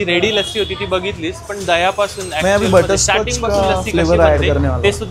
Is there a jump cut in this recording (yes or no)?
no